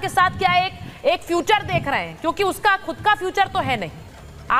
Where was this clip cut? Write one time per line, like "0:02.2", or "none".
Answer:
none